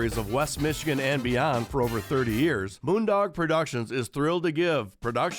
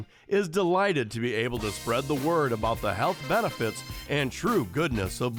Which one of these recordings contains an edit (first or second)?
first